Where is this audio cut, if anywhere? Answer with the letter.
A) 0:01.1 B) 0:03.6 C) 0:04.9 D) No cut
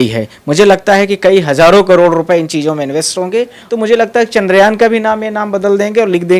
B